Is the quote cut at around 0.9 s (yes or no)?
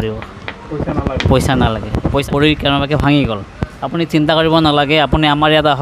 no